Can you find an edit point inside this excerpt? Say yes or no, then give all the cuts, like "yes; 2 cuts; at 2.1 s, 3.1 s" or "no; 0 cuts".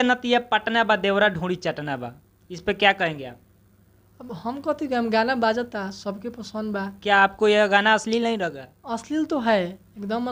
no; 0 cuts